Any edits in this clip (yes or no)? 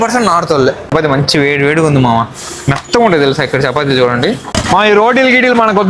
yes